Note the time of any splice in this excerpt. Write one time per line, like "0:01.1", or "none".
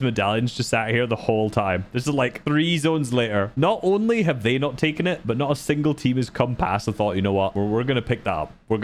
none